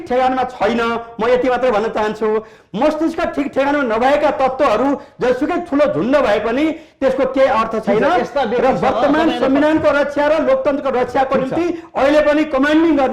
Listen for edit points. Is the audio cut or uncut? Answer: uncut